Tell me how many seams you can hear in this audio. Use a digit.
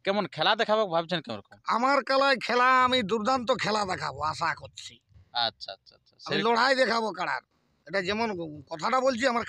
0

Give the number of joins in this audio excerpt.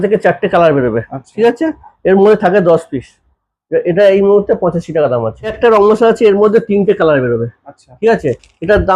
1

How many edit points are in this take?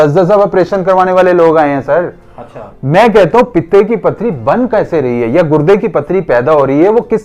0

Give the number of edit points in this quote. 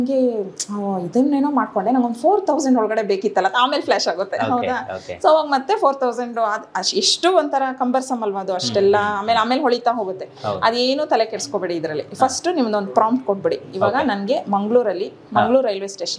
0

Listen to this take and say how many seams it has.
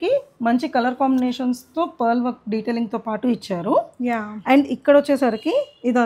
0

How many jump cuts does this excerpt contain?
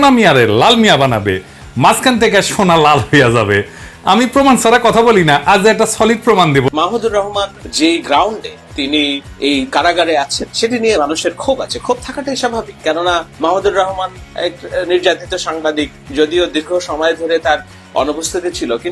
5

